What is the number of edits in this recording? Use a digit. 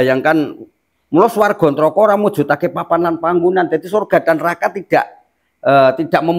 0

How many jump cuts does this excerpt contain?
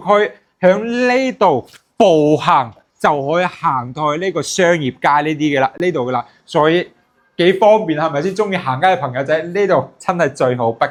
0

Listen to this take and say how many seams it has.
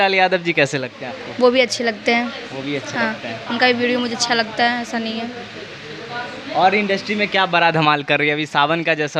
0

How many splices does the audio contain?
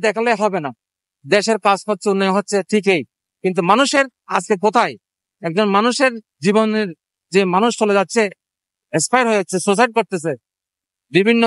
0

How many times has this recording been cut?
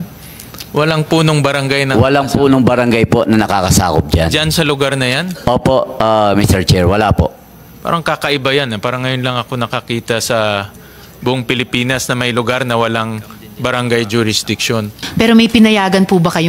1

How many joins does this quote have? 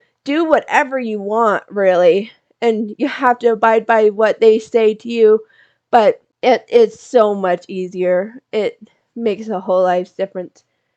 1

